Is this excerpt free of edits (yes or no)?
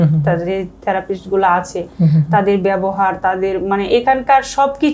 yes